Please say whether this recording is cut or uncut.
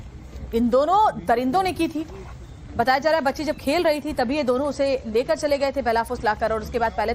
cut